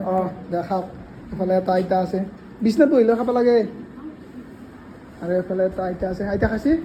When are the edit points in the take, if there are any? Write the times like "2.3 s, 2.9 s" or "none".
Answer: none